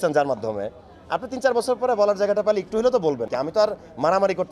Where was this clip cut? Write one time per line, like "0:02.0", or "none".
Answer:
0:03.3